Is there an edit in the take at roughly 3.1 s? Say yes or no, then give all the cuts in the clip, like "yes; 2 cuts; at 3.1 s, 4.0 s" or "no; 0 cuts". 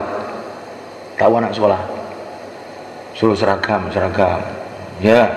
no; 0 cuts